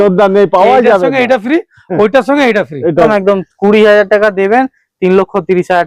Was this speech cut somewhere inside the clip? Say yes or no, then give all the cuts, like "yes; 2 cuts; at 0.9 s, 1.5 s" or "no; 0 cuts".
yes; 1 cut; at 3.1 s